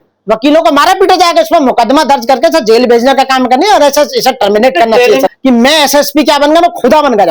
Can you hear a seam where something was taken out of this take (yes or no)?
yes